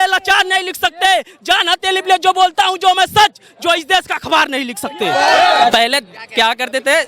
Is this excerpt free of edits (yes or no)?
no